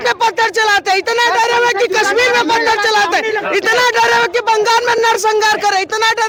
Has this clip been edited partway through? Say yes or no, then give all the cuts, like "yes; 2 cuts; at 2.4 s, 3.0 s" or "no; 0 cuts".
no; 0 cuts